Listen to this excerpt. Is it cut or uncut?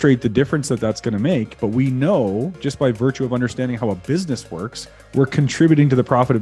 uncut